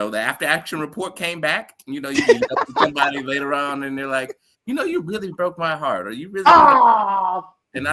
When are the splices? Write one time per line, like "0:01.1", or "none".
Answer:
none